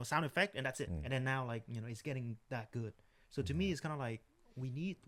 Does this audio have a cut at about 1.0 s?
yes; 1 cut; at 1.0 s

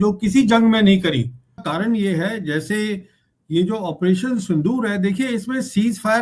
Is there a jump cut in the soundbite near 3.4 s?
no; 1 cut; at 1.6 s

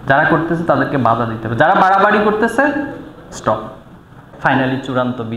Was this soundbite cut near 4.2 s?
yes; 1 cut; at 4.2 s

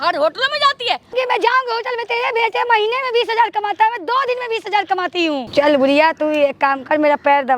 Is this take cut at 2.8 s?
no; 2 cuts; at 1.1 s, 5.5 s

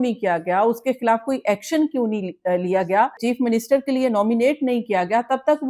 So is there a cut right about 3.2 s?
yes; 1 cut; at 3.2 s

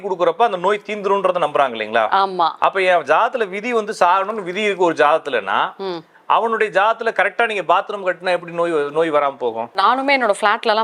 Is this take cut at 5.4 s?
no; 1 cut; at 9.7 s

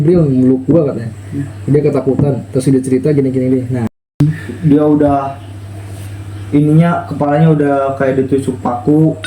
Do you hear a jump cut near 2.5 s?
no; 1 cut; at 4.2 s

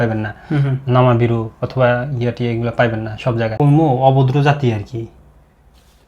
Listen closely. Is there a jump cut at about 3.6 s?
yes; 1 cut; at 3.6 s

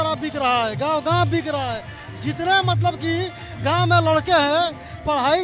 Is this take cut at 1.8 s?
no; 0 cuts

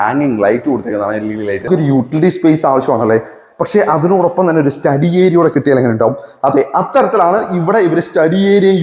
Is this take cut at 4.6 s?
no; 1 cut; at 1.7 s

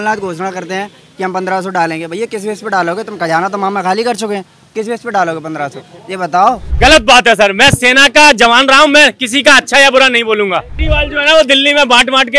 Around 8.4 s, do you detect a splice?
no; 2 cuts; at 6.7 s, 10.8 s

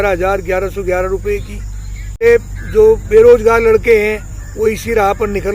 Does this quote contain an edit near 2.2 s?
yes; 1 cut; at 2.2 s

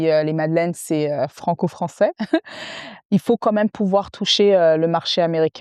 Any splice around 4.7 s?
no; 0 cuts

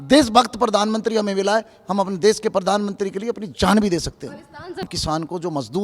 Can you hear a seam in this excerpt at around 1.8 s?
no; 1 cut; at 4.8 s

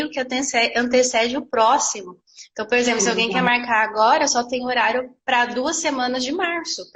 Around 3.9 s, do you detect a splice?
no; 0 cuts

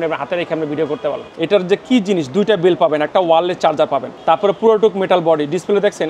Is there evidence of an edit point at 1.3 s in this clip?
yes; 2 cuts; at 1.3 s, 4.1 s

